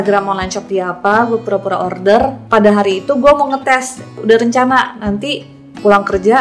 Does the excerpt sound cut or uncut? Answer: cut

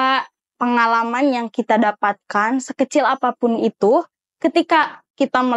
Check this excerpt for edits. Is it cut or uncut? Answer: uncut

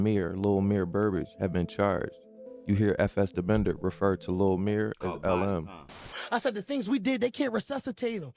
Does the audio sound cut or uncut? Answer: uncut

